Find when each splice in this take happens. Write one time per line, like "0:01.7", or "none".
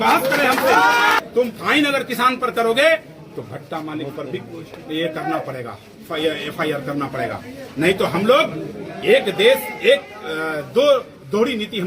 0:01.2